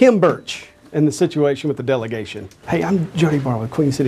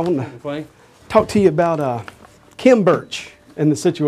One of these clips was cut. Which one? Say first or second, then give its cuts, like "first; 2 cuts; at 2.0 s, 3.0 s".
first; 1 cut; at 2.5 s